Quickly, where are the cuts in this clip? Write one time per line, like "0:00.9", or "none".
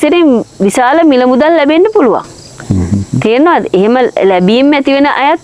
none